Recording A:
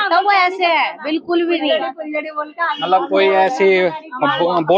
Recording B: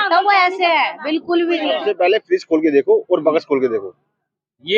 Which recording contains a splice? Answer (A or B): B